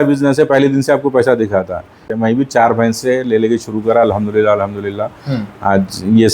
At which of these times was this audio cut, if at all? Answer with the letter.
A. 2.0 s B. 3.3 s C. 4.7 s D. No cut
A